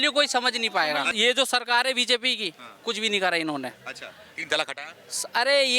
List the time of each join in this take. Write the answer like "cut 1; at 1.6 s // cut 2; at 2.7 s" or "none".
cut 1; at 1.1 s

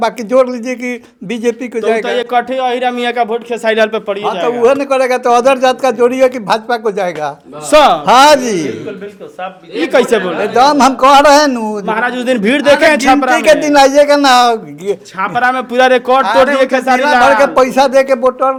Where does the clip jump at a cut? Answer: none

